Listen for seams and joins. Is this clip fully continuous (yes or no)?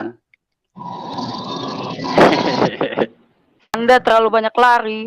no